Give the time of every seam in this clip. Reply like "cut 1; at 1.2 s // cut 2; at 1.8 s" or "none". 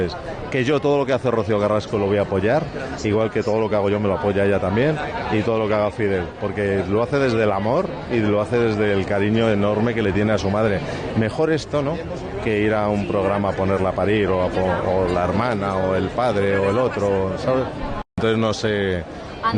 none